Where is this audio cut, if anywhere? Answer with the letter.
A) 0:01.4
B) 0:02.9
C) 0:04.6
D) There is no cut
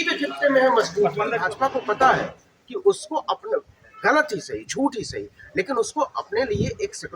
A